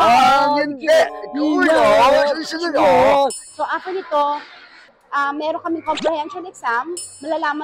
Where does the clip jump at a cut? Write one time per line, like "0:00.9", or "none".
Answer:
0:01.2
0:03.4